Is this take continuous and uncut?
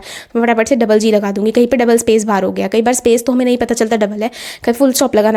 yes; 0 cuts

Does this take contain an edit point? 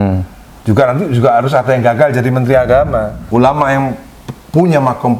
yes; 1 cut; at 3.2 s

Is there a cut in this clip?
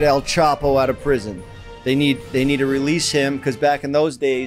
no; 0 cuts

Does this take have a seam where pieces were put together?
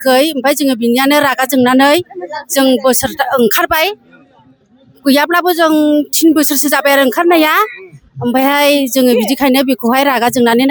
no; 0 cuts

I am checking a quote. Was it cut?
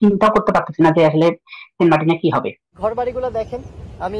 yes; 1 cut; at 2.6 s

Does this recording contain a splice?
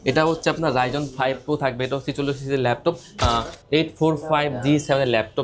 yes; 1 cut; at 3.2 s

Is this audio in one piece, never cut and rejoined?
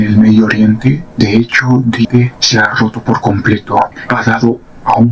no; 2 cuts; at 2.1 s, 4.0 s

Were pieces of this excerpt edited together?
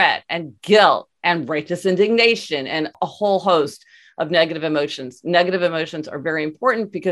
yes; 1 cut; at 2.9 s

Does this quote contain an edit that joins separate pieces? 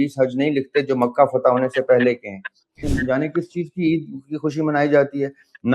yes; 1 cut; at 2.9 s

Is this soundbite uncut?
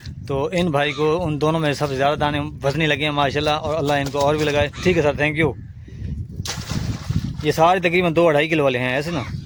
yes; 0 cuts

